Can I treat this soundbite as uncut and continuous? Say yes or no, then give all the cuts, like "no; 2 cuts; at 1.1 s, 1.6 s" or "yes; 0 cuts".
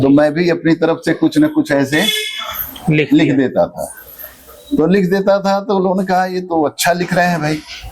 yes; 0 cuts